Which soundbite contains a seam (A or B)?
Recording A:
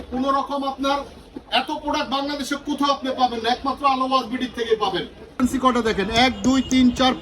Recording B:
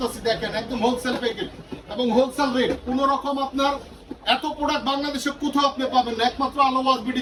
A